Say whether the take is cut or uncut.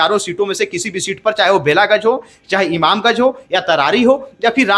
uncut